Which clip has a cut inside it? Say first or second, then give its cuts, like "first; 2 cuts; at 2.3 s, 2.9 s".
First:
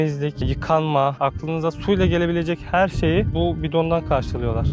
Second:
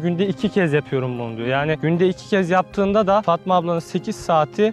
first; 2 cuts; at 1.1 s, 3.3 s